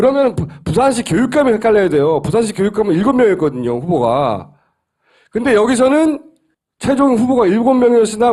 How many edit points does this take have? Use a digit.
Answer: 0